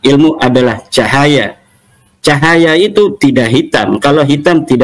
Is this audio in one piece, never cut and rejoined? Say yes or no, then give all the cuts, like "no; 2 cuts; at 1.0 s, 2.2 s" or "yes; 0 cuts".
yes; 0 cuts